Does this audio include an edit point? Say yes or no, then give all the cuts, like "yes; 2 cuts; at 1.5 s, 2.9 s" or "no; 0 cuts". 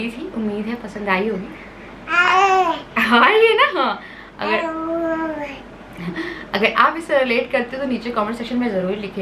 no; 0 cuts